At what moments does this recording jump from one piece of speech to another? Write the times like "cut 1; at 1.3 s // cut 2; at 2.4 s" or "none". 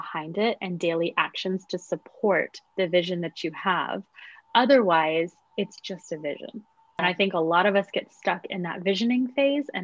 cut 1; at 7.0 s